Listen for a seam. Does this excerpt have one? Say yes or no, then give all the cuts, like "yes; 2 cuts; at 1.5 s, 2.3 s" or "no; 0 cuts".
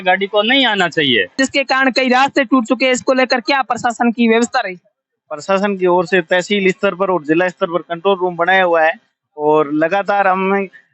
yes; 1 cut; at 1.4 s